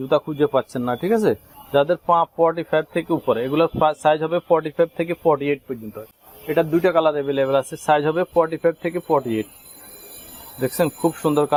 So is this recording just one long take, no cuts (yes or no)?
yes